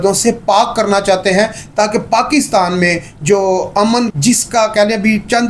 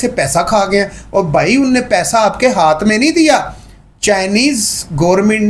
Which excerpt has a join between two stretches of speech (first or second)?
first